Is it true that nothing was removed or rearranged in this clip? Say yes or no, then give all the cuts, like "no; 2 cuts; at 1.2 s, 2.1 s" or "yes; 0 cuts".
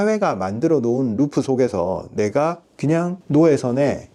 yes; 0 cuts